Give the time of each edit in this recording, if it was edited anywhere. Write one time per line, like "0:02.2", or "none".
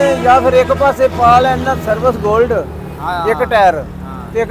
none

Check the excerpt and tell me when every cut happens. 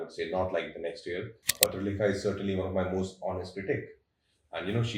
0:01.5

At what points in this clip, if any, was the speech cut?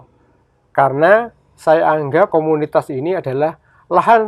0:02.3

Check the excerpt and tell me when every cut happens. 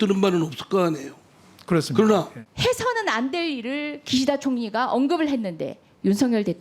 0:02.4
0:04.0

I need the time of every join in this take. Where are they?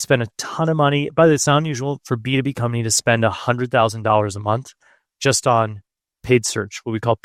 none

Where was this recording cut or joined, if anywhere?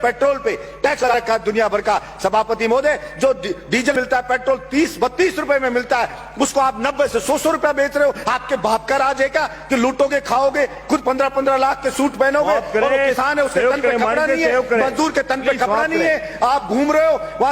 0:01.1
0:03.9

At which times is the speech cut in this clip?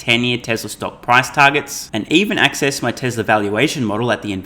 none

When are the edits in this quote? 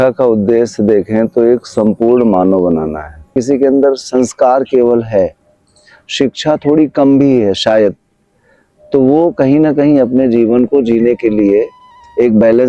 0:03.3

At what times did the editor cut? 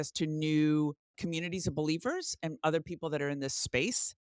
0:01.2

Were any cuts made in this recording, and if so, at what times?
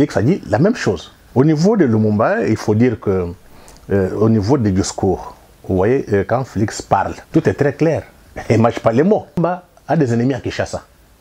0:01.1
0:07.2
0:09.4

